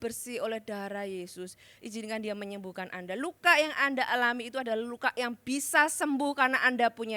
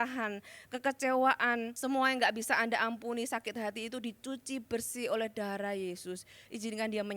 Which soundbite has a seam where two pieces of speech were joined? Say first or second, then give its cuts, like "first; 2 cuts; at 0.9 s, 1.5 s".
second; 1 cut; at 1.7 s